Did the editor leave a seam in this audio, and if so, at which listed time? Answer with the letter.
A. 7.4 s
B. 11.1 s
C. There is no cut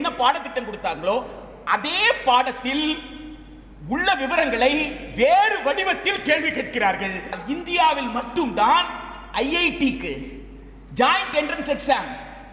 A